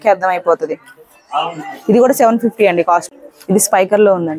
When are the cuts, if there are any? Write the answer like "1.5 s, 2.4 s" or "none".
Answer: 3.1 s